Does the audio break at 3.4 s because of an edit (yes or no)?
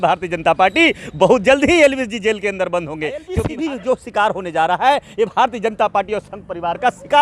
yes